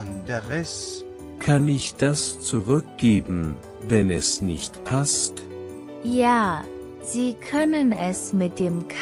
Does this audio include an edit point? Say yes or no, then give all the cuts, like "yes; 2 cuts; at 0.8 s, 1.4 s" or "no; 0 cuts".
no; 0 cuts